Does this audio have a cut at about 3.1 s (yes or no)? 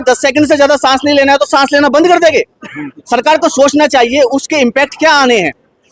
no